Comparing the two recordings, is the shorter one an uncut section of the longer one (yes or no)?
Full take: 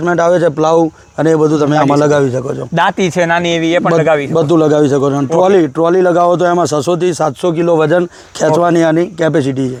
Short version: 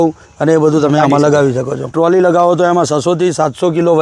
no